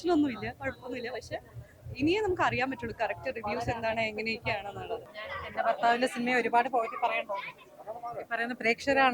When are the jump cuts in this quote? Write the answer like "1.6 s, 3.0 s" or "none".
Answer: 5.1 s